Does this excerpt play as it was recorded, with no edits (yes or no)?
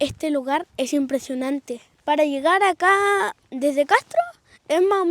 no